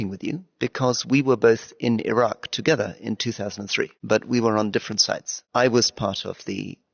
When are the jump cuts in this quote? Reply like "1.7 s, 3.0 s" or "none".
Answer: 4.0 s, 5.4 s